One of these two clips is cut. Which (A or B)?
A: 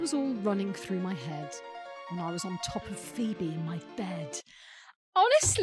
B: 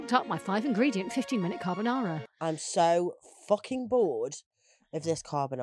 B